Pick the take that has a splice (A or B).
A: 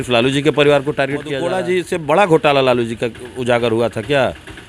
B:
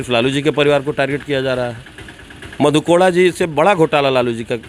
A